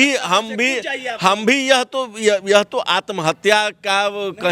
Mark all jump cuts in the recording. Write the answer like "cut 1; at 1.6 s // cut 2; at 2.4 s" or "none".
none